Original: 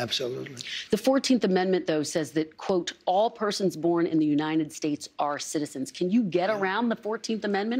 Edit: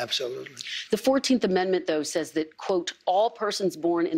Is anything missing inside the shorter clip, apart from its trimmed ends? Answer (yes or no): no